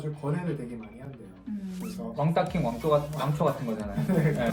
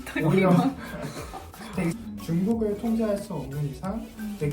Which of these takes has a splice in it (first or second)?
second